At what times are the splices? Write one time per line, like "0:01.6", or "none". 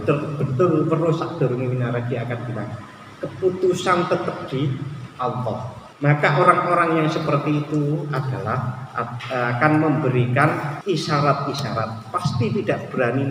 0:05.8
0:10.7